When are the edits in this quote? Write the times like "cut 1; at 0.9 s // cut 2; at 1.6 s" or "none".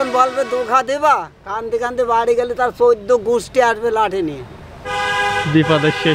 none

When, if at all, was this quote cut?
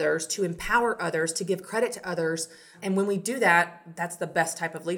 cut 1; at 2.7 s

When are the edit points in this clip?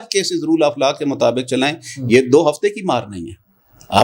none

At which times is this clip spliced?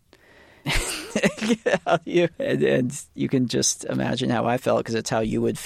cut 1; at 2.4 s

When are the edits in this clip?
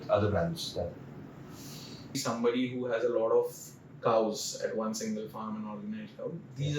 cut 1; at 2.2 s

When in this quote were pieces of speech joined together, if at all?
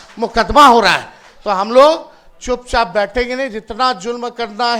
none

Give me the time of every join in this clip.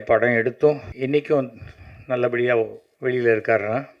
cut 1; at 0.9 s // cut 2; at 2.8 s

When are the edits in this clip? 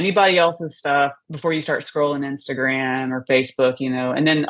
cut 1; at 1.2 s

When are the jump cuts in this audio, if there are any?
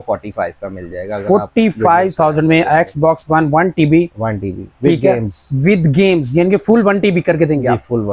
none

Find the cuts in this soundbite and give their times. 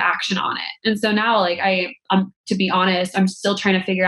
none

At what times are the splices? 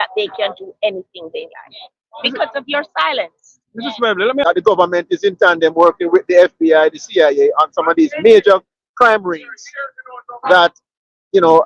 cut 1; at 4.4 s

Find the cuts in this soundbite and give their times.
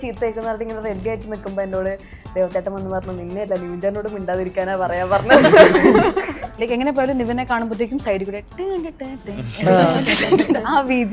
cut 1; at 6.5 s

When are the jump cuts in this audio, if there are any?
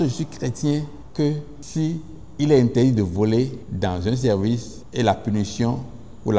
cut 1; at 1.0 s // cut 2; at 1.6 s // cut 3; at 3.6 s // cut 4; at 4.8 s

